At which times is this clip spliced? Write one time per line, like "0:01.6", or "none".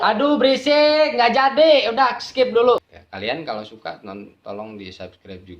0:02.8